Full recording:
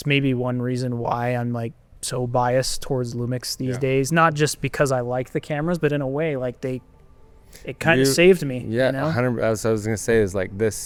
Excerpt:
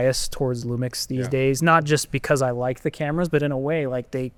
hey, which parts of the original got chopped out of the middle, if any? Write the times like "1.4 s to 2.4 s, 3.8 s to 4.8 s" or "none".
none